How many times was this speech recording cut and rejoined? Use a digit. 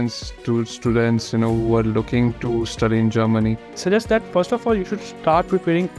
1